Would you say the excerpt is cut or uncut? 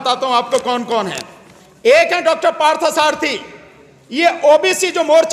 uncut